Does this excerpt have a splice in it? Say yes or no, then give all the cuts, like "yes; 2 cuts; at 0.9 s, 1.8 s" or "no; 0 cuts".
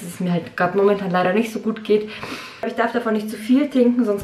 yes; 1 cut; at 2.7 s